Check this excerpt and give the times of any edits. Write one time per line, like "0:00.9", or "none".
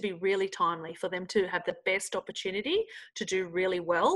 none